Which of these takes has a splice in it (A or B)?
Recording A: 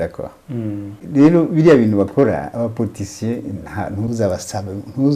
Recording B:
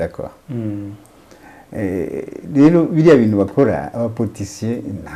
A